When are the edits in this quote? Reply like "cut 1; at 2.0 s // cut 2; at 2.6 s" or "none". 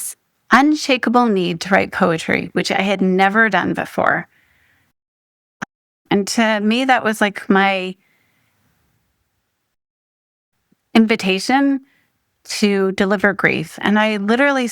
cut 1; at 6.0 s